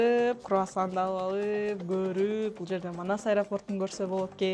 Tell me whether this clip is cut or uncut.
uncut